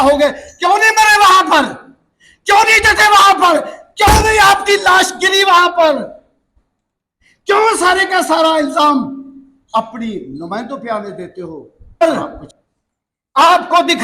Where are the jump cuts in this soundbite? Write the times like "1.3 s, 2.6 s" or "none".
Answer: 12.0 s